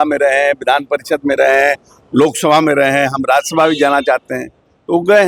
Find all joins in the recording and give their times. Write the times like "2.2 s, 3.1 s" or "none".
none

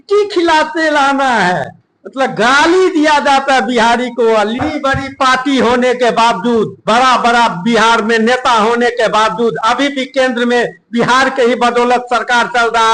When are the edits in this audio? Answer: 4.6 s

